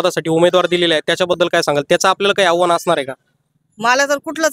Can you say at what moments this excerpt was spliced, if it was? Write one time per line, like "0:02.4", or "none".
none